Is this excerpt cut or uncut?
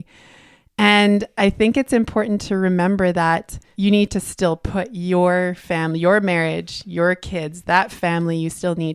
cut